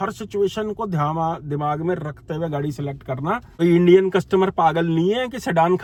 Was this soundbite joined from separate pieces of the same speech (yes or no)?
no